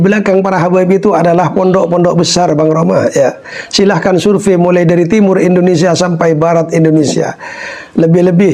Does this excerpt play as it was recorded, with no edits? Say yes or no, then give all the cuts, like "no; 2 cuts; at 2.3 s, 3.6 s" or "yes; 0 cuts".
yes; 0 cuts